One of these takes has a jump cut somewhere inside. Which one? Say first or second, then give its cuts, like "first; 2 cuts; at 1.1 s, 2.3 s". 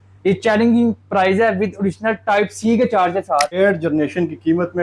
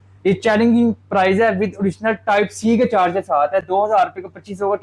first; 1 cut; at 3.5 s